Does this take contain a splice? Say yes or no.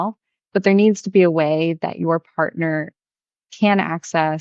no